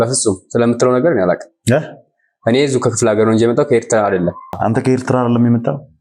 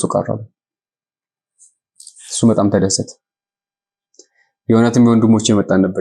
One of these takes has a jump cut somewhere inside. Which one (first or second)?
first